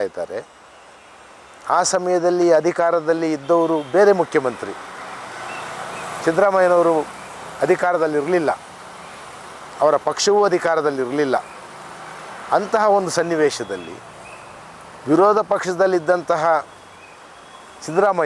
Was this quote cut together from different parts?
no; 0 cuts

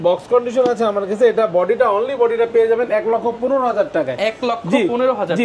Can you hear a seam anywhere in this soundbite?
no; 0 cuts

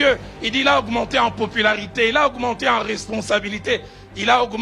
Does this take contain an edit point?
no; 0 cuts

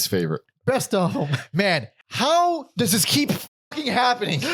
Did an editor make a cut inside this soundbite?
yes; 1 cut; at 2.0 s

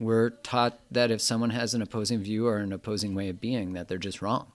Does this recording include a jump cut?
no; 0 cuts

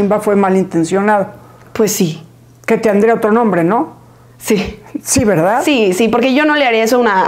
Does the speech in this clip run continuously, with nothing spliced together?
yes; 0 cuts

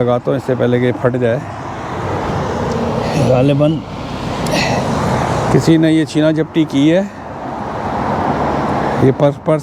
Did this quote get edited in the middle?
no; 0 cuts

